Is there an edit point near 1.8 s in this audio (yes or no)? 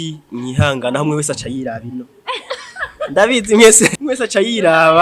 no